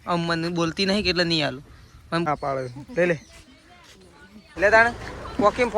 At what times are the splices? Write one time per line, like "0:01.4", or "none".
0:02.3
0:04.5